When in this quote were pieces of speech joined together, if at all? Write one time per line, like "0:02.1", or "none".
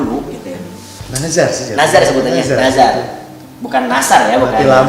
0:01.0